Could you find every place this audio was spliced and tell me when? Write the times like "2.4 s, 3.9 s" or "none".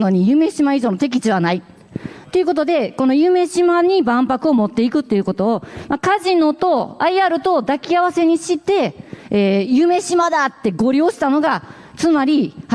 none